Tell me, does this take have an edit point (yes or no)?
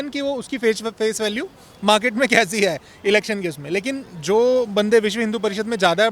no